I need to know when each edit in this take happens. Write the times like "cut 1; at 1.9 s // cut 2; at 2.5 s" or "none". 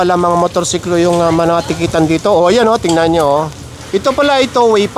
none